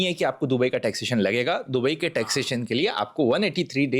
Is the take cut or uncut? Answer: uncut